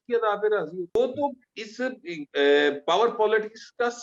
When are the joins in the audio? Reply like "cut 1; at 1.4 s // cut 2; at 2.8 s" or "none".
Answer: cut 1; at 1.0 s